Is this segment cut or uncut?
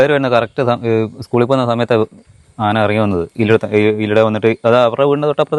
uncut